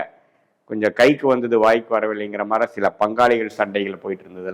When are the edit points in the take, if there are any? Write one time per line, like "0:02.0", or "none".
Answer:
none

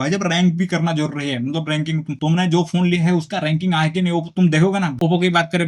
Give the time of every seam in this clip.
none

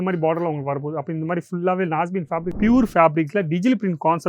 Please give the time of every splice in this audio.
0:02.5

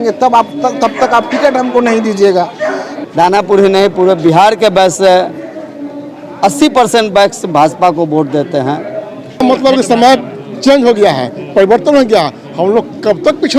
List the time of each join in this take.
0:02.9
0:09.3

